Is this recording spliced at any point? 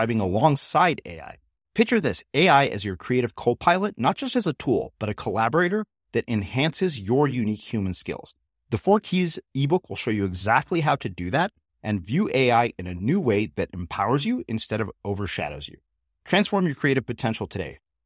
no; 0 cuts

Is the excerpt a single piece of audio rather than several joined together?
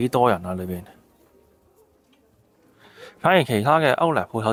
yes; 0 cuts

